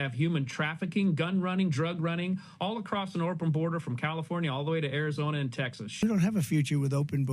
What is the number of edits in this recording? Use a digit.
1